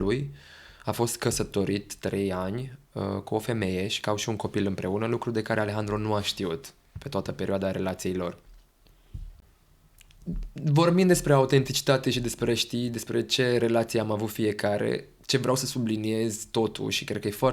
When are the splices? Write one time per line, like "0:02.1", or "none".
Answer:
0:09.3